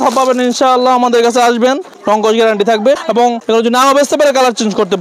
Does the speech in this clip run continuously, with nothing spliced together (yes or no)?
no